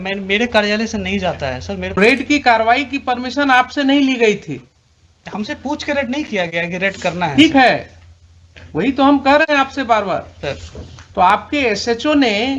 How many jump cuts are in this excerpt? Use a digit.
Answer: 1